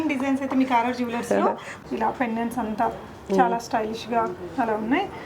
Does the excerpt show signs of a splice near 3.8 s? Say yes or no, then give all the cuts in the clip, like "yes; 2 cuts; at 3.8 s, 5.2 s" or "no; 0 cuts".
no; 1 cut; at 1.7 s